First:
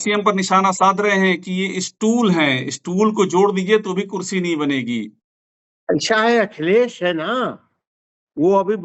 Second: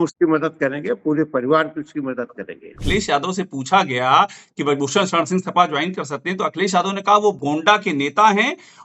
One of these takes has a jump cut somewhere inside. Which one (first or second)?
second